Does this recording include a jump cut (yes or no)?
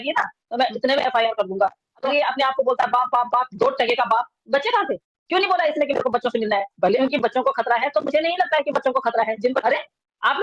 yes